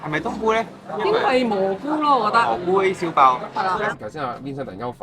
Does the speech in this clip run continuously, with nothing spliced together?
no; 1 cut; at 3.9 s

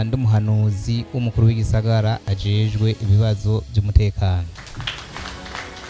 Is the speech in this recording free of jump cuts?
yes; 0 cuts

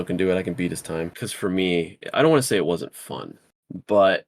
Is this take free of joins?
no; 1 cut; at 1.3 s

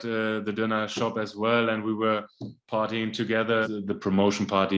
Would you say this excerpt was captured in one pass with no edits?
no; 1 cut; at 3.6 s

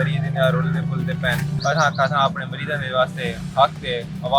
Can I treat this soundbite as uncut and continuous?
no; 1 cut; at 1.5 s

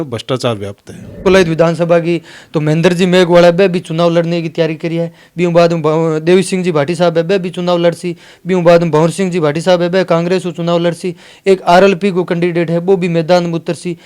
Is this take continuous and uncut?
no; 1 cut; at 1.2 s

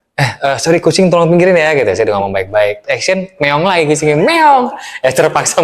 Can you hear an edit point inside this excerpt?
yes; 1 cut; at 2.8 s

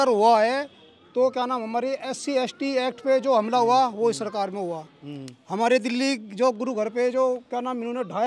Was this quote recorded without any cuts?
yes; 0 cuts

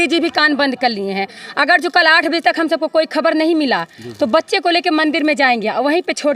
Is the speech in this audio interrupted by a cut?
no; 0 cuts

